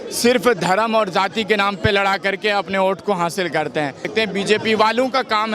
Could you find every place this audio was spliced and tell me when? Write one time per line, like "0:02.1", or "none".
0:04.0